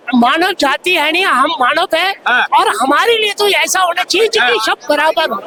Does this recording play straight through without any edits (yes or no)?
yes